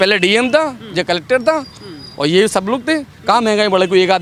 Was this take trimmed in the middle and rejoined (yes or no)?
no